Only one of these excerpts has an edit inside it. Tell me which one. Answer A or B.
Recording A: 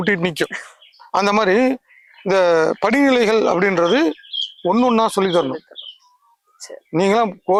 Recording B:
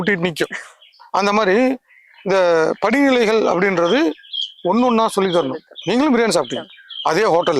B